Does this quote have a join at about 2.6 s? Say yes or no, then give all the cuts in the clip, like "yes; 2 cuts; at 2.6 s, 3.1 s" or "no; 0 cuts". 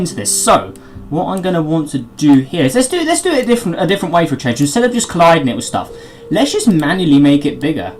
yes; 1 cut; at 2.6 s